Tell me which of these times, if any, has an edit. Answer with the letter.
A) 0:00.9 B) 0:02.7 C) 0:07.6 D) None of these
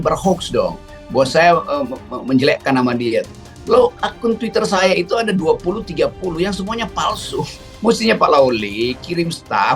D